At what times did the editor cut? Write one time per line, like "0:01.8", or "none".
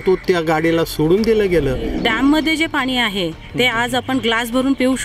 0:02.0